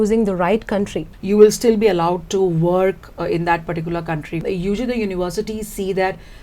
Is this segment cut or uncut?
cut